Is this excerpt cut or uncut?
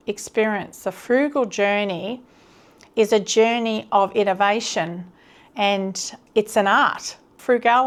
uncut